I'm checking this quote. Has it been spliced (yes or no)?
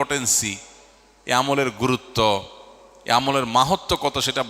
no